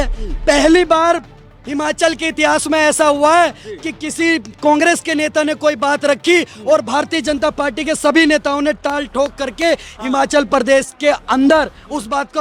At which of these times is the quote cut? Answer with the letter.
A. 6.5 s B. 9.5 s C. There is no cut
C